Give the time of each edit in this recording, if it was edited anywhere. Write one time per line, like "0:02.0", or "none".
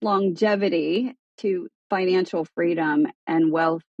0:01.5
0:03.2